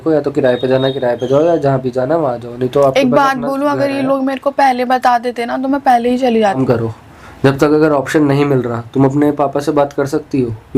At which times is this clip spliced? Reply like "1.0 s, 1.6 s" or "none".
6.6 s